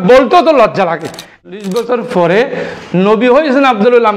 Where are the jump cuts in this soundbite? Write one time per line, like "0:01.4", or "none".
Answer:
0:01.3